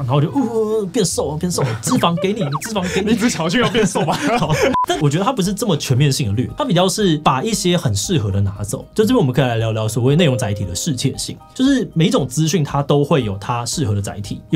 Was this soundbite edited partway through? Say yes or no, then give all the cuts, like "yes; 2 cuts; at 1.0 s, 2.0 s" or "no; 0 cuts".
no; 0 cuts